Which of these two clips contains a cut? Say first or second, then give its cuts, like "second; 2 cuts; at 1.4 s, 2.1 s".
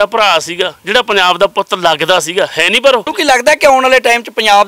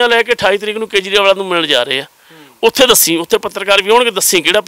first; 1 cut; at 3.1 s